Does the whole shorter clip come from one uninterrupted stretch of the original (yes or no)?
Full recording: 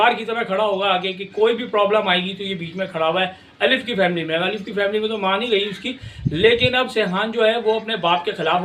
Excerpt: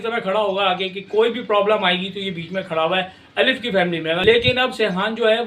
no